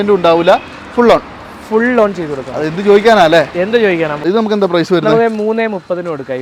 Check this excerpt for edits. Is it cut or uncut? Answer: cut